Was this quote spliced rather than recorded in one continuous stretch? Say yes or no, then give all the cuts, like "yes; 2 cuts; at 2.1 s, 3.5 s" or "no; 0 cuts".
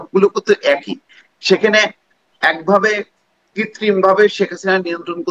no; 0 cuts